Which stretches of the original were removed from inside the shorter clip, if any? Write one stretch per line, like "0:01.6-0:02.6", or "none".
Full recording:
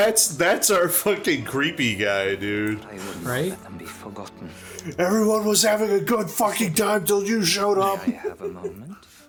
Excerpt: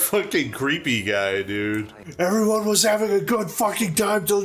0:02.9-0:04.8